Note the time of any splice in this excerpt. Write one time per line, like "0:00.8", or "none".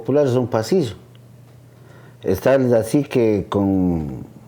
none